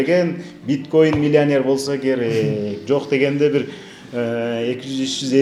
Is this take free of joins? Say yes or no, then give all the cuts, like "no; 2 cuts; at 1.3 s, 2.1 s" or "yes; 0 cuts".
yes; 0 cuts